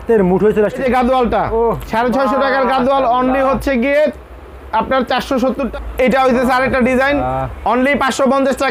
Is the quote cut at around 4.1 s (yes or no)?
no